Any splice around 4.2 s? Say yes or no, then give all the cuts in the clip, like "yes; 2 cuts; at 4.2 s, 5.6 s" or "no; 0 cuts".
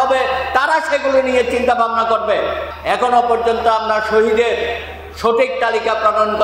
no; 1 cut; at 2.7 s